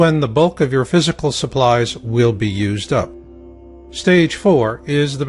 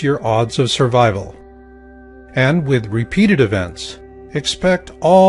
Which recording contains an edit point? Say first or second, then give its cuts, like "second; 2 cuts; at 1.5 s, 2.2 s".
second; 1 cut; at 2.5 s